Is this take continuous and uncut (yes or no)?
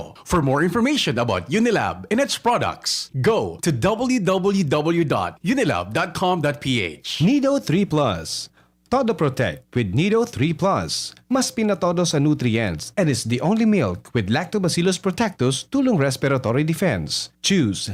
yes